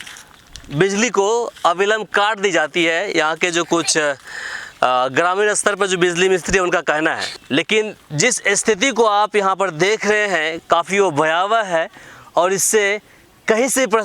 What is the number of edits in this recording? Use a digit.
1